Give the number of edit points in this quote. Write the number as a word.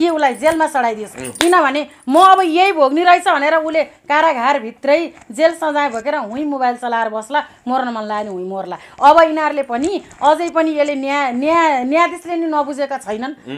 zero